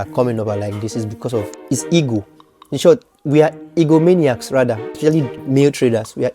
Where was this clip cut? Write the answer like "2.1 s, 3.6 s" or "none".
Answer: 1.6 s, 4.9 s